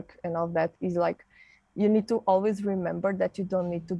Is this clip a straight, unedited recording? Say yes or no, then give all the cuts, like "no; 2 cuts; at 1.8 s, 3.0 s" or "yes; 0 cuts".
yes; 0 cuts